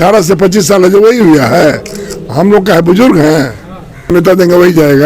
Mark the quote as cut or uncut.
cut